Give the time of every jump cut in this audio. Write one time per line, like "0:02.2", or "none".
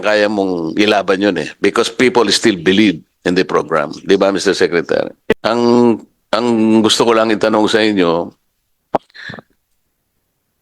0:05.3